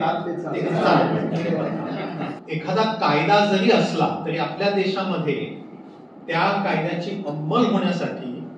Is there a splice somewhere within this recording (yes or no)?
yes